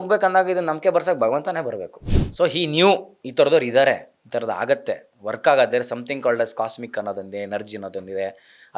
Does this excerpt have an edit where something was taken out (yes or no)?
yes